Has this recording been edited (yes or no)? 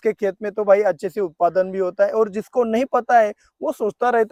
no